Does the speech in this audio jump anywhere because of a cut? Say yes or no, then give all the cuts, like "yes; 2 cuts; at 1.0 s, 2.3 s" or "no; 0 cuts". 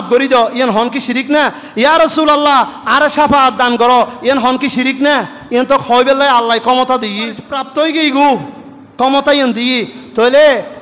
yes; 1 cut; at 7.6 s